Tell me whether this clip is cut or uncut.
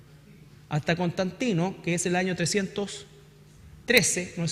cut